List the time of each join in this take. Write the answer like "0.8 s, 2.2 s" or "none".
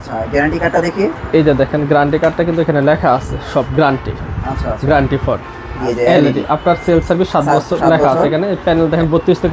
5.8 s

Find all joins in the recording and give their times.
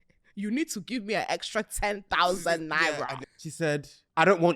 3.5 s

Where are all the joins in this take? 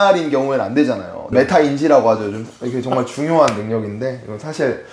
1.1 s

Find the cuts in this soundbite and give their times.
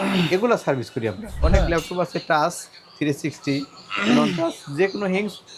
1.3 s

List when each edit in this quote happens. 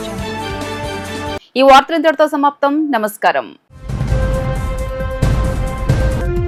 none

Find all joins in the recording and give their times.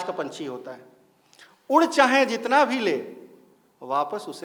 none

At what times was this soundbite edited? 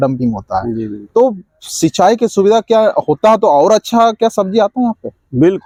none

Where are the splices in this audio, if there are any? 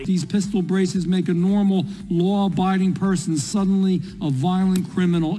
none

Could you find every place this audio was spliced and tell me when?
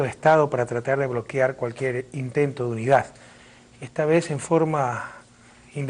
0.9 s

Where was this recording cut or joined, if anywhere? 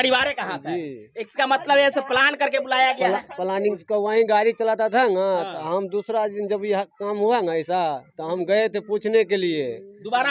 3.8 s

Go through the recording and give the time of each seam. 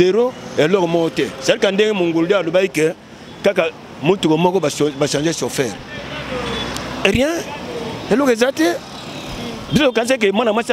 none

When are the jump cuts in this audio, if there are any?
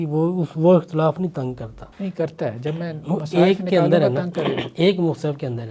1.9 s

